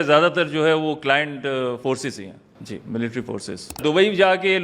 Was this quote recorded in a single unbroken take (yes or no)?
no